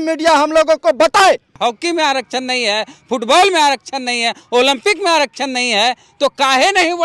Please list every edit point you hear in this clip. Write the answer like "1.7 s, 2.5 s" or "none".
1.5 s